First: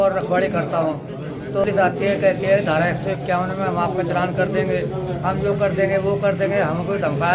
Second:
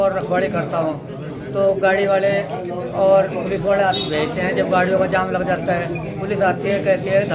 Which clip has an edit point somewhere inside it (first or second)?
first